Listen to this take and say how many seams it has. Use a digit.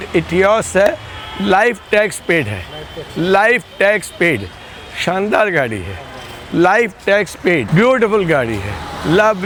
0